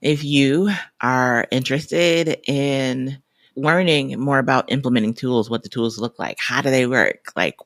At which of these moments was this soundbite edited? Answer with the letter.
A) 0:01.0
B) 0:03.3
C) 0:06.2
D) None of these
D